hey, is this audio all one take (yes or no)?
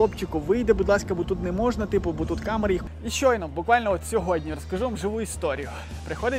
no